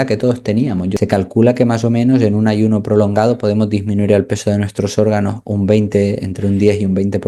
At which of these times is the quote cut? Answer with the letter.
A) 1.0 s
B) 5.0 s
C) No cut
A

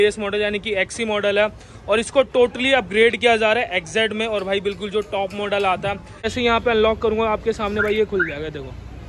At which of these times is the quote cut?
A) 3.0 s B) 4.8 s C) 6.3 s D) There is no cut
C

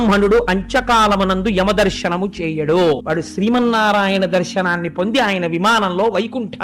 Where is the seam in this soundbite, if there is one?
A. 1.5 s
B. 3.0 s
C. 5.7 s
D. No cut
B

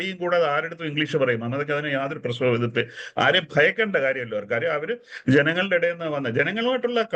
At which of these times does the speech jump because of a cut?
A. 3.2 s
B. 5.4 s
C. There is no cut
C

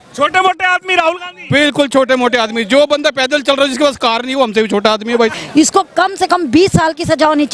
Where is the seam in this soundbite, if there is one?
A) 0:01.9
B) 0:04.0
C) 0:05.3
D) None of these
C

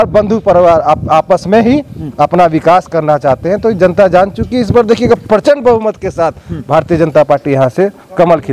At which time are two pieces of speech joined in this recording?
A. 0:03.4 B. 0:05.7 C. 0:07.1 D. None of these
D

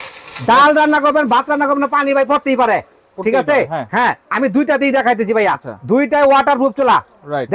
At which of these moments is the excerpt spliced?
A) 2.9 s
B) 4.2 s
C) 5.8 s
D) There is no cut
D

